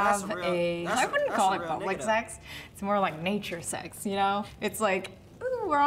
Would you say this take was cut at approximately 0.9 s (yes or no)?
yes